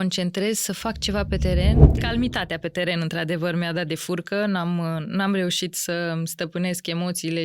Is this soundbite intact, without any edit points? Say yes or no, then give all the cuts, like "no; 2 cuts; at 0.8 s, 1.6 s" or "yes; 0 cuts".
no; 1 cut; at 1.9 s